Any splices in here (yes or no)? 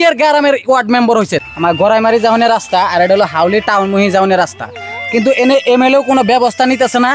yes